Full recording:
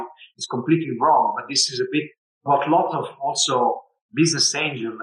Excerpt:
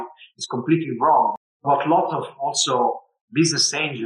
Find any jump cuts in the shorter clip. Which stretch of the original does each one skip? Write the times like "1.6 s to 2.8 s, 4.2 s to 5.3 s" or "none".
1.5 s to 2.3 s